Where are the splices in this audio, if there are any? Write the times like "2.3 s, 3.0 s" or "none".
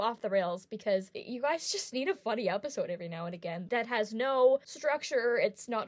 1.2 s, 3.8 s, 4.7 s